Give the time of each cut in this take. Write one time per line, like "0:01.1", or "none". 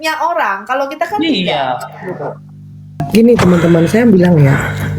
0:03.1